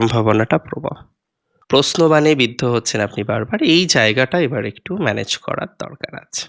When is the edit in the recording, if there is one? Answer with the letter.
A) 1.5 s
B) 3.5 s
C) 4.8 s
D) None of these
A